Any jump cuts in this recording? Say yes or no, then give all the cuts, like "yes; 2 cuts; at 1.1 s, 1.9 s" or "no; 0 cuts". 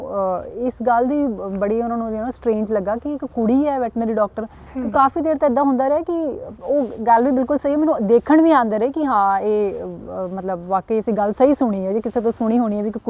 no; 0 cuts